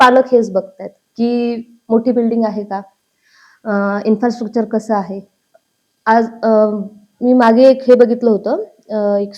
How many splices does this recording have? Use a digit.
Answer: 0